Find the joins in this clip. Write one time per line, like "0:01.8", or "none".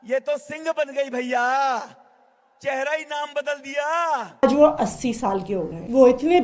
0:04.4